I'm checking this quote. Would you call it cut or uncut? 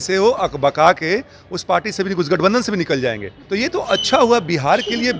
uncut